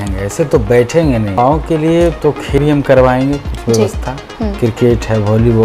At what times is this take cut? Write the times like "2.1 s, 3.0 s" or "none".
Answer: 1.4 s, 2.6 s